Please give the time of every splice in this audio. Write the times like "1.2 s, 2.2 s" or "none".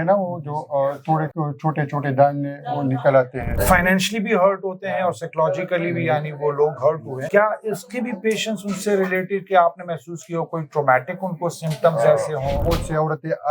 1.3 s, 3.6 s, 7.1 s, 12.6 s